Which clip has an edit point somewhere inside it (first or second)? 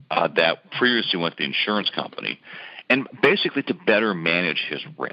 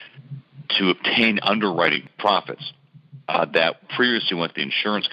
second